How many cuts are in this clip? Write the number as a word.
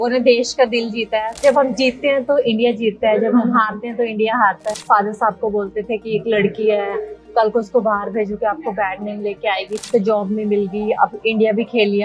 three